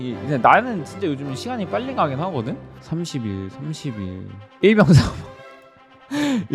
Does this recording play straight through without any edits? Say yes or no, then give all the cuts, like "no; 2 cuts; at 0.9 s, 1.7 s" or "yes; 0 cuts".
no; 1 cut; at 2.7 s